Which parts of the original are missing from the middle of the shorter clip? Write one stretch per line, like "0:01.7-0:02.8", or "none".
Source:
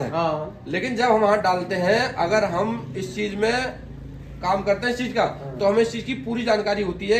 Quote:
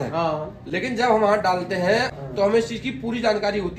0:02.1-0:05.4